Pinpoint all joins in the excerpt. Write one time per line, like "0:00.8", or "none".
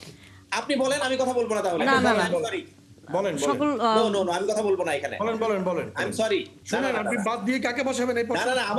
0:06.6